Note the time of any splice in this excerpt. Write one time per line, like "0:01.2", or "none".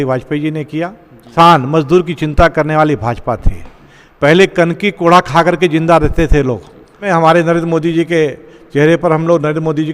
0:01.3
0:07.0